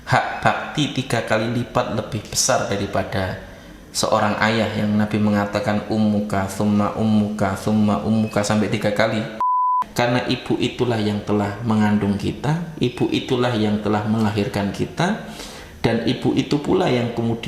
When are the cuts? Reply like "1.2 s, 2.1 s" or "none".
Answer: 9.8 s